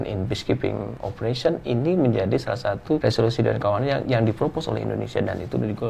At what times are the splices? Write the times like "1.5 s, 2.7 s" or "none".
1.0 s, 3.0 s